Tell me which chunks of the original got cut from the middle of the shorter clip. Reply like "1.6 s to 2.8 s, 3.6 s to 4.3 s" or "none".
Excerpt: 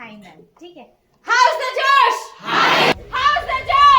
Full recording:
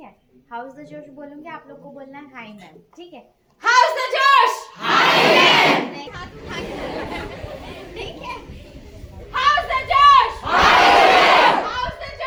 5.3 s to 9.1 s